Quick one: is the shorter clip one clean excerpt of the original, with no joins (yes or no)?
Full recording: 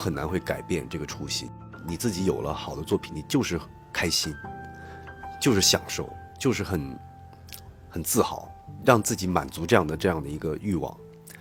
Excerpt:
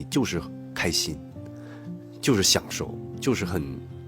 yes